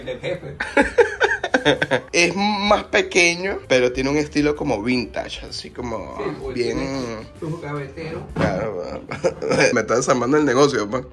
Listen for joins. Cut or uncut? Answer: uncut